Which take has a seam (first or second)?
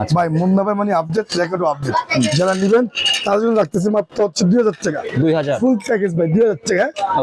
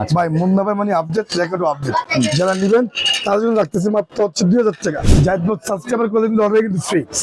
second